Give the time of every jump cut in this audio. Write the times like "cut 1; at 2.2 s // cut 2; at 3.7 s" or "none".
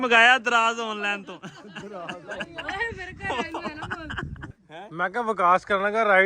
cut 1; at 4.5 s